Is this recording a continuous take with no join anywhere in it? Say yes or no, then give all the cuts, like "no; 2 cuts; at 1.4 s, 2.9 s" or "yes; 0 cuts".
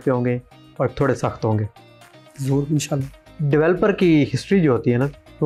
yes; 0 cuts